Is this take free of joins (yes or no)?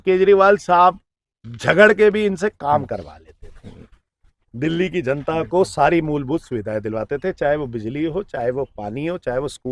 yes